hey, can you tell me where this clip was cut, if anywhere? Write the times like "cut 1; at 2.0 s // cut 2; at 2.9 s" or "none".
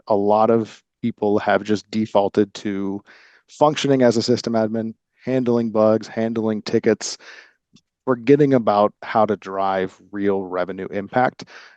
cut 1; at 7.6 s